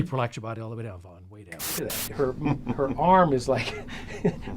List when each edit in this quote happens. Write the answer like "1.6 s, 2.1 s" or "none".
1.8 s